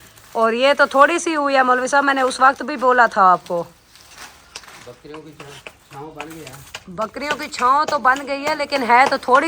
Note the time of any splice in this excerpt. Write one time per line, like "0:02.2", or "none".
none

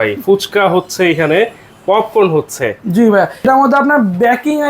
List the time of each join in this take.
0:03.4

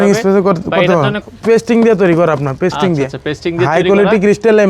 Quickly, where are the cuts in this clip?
0:01.2

